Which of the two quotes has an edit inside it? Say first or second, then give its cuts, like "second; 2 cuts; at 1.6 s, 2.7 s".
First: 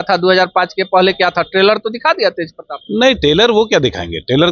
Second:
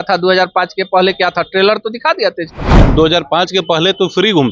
second; 1 cut; at 2.8 s